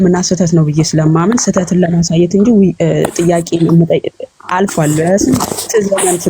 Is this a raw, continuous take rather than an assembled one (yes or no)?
yes